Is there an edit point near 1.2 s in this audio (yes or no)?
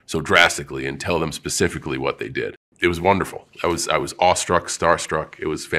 no